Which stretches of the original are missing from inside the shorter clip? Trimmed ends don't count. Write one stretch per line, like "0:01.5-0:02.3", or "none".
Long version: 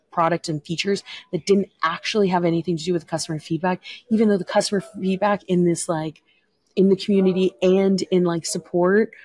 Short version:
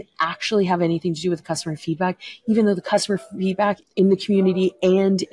0:05.4-0:06.6